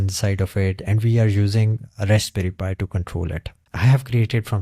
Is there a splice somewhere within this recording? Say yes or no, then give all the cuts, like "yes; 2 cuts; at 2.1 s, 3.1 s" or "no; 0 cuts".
yes; 1 cut; at 3.5 s